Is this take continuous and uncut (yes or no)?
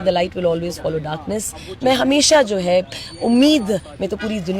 yes